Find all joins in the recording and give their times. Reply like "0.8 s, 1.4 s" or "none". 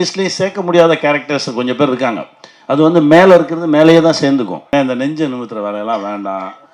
4.7 s